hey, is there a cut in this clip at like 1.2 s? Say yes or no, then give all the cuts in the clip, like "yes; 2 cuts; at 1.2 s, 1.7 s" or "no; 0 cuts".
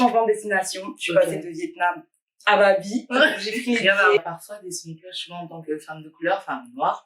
no; 1 cut; at 4.2 s